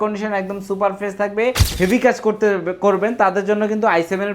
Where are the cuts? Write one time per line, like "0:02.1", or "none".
0:01.7